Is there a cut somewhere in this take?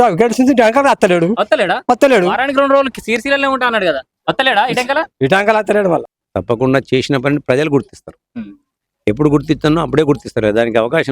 yes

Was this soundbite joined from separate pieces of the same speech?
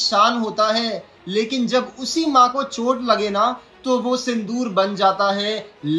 no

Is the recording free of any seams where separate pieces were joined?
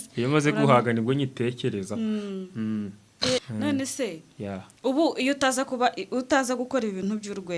no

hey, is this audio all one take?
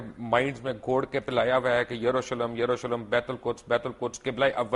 yes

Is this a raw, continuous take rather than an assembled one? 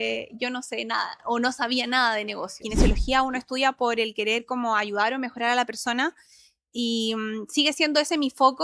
no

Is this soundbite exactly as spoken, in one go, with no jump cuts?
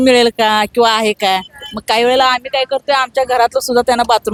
yes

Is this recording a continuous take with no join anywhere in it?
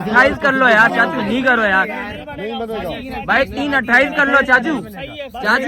yes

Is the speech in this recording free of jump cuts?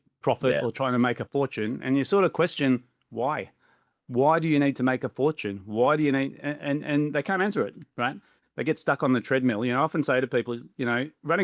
yes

